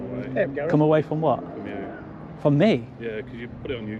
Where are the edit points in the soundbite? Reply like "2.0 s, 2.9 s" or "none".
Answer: none

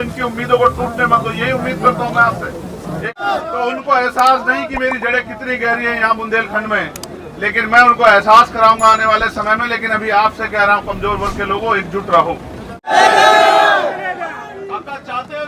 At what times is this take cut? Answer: 3.2 s, 12.9 s

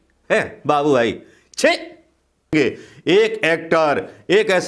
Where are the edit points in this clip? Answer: 2.5 s

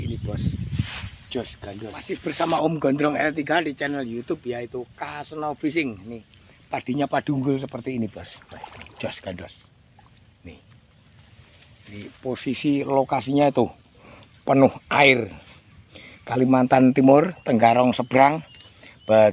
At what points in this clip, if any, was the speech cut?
2.1 s

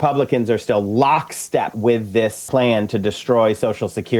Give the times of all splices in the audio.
2.2 s

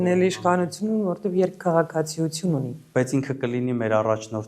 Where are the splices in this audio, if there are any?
none

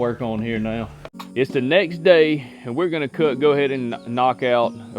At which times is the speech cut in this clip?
1.1 s

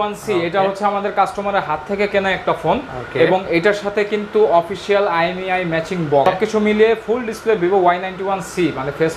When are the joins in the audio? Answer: 6.3 s

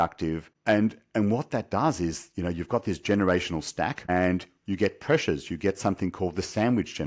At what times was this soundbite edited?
none

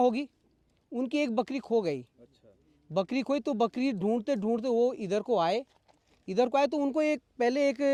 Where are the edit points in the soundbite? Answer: none

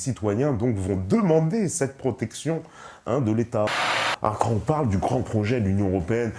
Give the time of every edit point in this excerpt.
3.9 s

